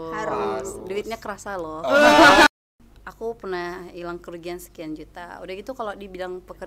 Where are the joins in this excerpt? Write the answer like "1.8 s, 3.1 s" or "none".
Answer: 2.5 s